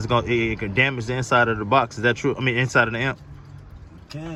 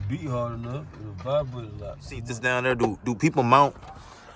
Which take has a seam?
second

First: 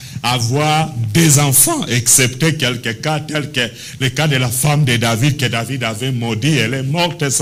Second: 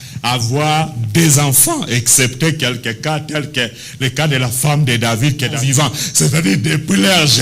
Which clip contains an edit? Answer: second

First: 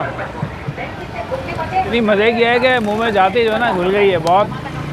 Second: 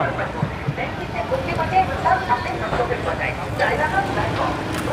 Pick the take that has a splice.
first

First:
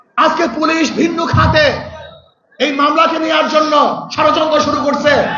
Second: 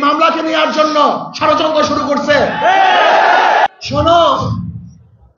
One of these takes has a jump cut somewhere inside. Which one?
second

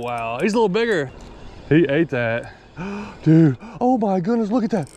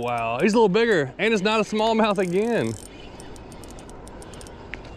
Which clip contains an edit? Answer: first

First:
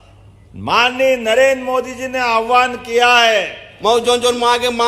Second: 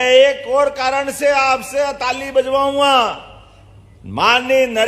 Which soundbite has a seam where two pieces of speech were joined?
first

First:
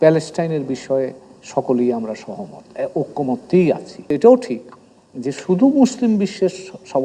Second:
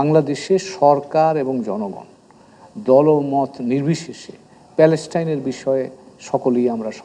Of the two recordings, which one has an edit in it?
first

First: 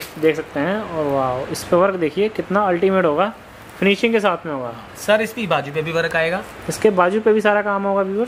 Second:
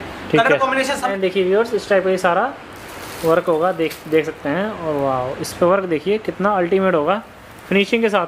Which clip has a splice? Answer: second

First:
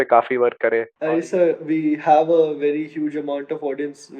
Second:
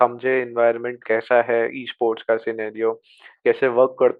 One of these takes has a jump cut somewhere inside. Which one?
first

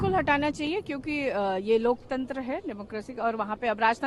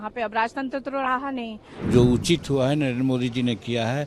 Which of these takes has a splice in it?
second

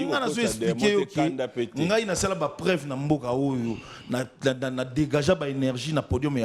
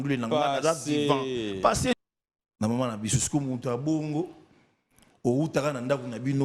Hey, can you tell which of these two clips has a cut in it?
second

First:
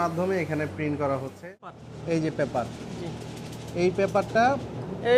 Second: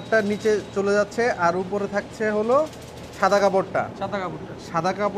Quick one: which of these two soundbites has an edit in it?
first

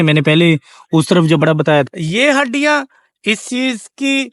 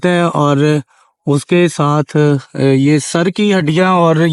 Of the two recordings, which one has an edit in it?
first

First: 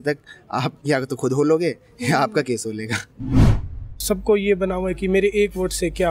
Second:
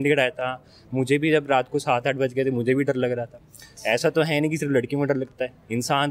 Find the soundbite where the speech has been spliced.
first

